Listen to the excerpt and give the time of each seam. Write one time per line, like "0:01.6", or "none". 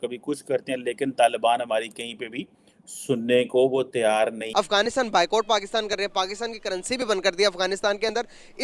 0:04.4